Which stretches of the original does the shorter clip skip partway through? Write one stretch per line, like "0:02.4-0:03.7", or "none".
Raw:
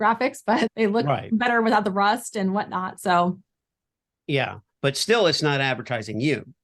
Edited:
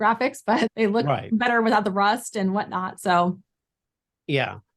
none